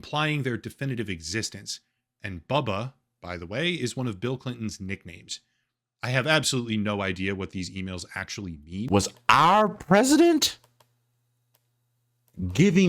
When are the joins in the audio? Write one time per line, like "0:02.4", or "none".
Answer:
0:08.9